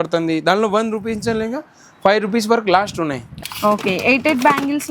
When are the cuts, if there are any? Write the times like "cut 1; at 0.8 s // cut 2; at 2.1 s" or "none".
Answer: cut 1; at 3.3 s